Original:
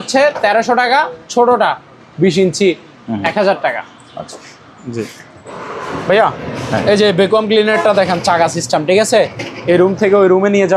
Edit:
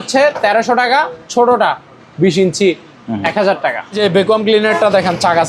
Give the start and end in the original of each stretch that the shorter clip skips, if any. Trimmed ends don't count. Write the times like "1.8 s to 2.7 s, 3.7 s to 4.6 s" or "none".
4.0 s to 7.0 s